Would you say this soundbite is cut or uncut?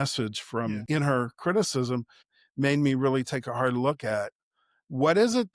cut